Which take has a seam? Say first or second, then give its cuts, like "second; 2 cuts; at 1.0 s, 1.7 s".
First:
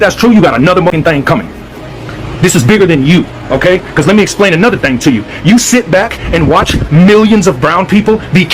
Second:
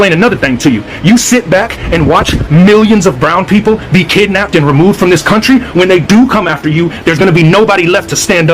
first; 1 cut; at 0.9 s